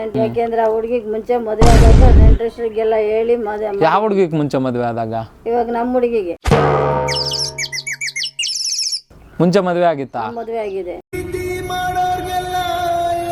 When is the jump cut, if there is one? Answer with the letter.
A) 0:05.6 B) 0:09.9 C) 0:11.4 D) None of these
D